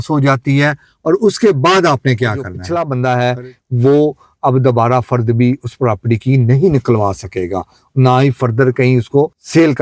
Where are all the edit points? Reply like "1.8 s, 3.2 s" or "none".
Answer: 2.5 s